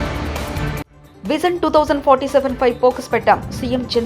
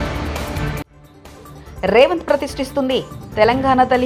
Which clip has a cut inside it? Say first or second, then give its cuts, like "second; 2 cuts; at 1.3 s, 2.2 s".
first; 1 cut; at 1.0 s